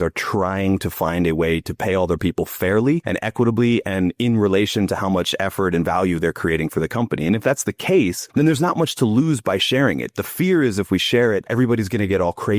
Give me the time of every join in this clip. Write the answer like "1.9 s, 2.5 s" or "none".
3.1 s, 8.2 s, 11.5 s